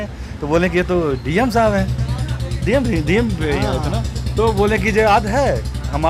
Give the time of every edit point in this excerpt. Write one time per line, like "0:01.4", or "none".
none